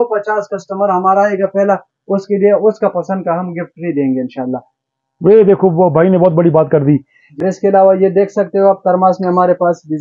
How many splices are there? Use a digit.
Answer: 1